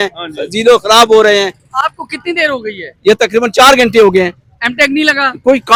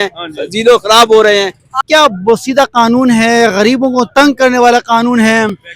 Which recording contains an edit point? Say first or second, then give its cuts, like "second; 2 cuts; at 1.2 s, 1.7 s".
second; 1 cut; at 1.7 s